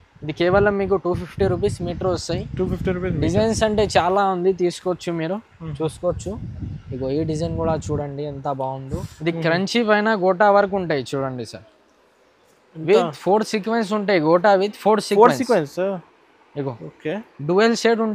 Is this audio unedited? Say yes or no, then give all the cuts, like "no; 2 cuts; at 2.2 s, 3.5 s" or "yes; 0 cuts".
no; 1 cut; at 9.1 s